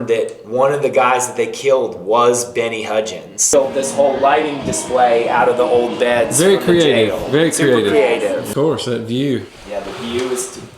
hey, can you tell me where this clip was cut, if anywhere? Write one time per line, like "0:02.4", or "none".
0:03.5
0:08.5